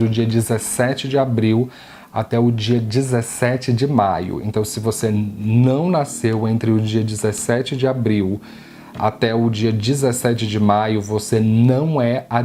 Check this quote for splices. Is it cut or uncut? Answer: uncut